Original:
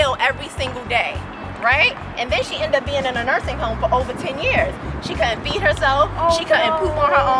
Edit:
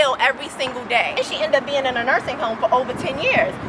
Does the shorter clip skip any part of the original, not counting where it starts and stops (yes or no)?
yes